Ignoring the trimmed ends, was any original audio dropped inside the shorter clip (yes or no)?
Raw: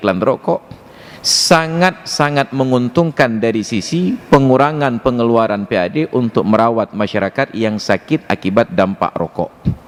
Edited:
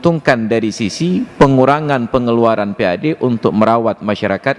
no